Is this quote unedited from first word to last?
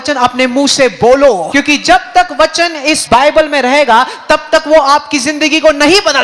no; 2 cuts; at 1.5 s, 3.0 s

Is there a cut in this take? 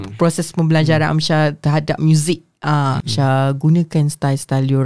yes; 1 cut; at 3.0 s

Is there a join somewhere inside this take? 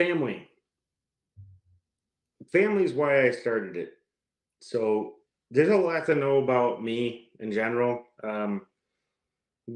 no; 0 cuts

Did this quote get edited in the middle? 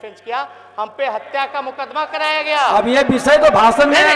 no; 0 cuts

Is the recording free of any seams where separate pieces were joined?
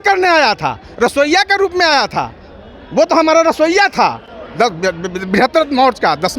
yes; 0 cuts

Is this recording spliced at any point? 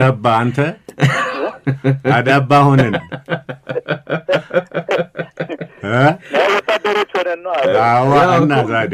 no; 0 cuts

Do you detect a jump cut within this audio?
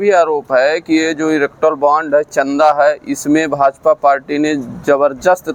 no; 0 cuts

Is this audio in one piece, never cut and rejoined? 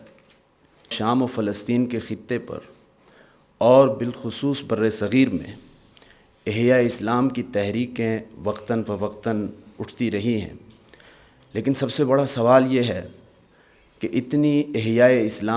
no; 1 cut; at 0.9 s

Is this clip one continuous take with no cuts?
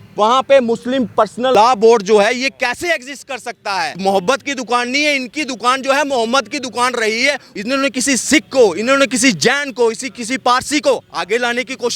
no; 3 cuts; at 1.5 s, 3.9 s, 7.5 s

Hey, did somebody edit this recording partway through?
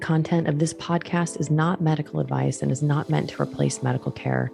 no; 0 cuts

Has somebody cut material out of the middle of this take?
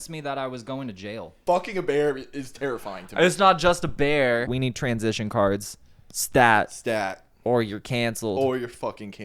yes; 2 cuts; at 1.3 s, 4.5 s

